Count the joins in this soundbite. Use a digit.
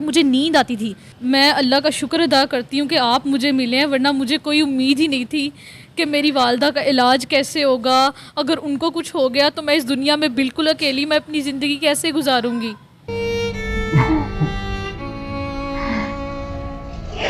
1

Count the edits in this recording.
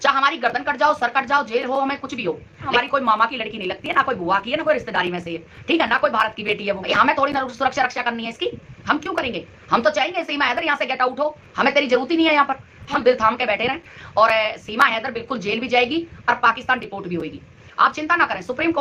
3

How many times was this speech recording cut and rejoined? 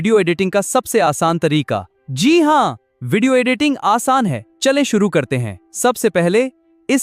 0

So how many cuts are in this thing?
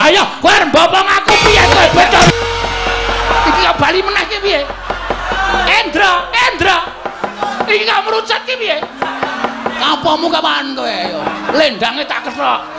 1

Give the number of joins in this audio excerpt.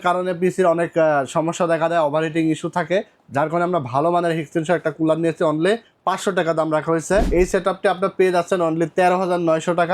2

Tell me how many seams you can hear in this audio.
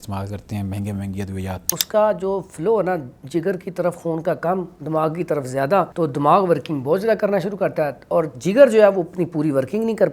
2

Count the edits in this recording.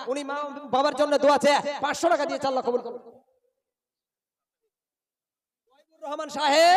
0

